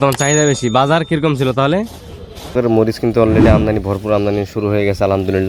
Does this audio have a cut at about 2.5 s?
yes; 1 cut; at 2.5 s

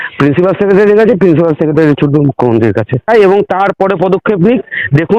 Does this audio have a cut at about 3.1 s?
yes; 1 cut; at 3.1 s

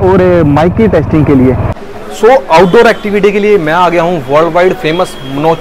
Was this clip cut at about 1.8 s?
yes; 1 cut; at 1.8 s

